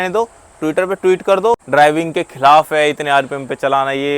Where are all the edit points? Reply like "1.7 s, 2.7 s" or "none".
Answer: 1.6 s